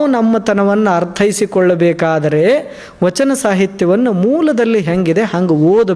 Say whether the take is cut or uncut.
uncut